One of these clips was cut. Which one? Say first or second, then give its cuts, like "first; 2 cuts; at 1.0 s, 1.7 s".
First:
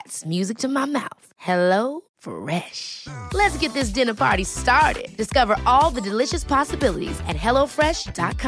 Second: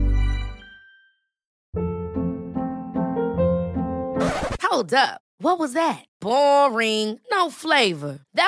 second; 1 cut; at 1.5 s